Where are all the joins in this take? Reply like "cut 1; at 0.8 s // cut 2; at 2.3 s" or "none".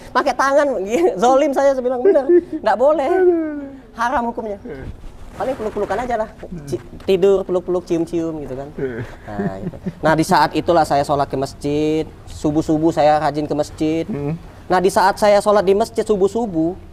none